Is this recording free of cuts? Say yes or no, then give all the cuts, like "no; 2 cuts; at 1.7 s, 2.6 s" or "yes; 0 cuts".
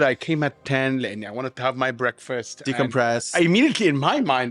no; 1 cut; at 3.3 s